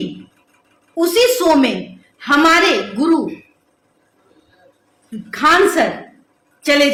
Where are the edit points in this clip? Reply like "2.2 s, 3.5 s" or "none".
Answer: none

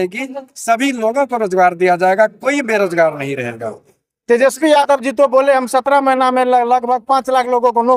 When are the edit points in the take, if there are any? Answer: none

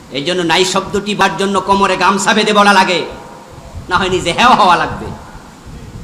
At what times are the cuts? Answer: 1.2 s

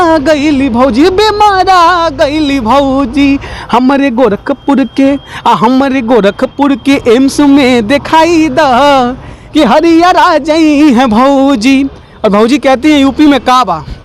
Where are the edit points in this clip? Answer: none

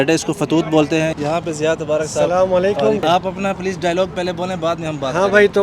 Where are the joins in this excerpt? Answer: 1.1 s, 3.0 s

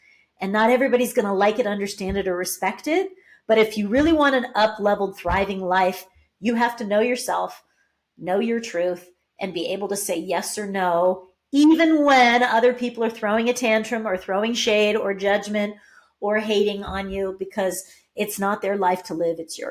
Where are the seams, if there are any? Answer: none

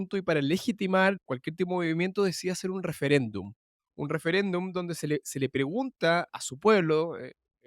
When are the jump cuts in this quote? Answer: 6.3 s

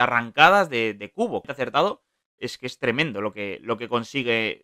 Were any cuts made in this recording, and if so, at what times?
1.5 s

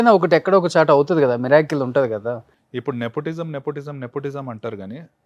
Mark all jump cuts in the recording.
2.5 s

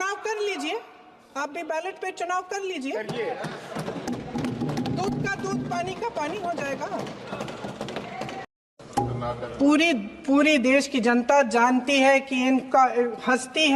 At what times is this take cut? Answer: 8.5 s

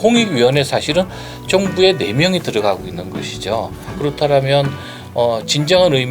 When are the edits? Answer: 3.9 s

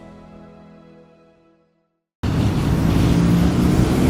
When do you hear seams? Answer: 2.2 s

